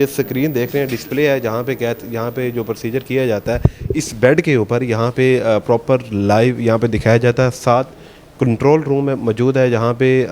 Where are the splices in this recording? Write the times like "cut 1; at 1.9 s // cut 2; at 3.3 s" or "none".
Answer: none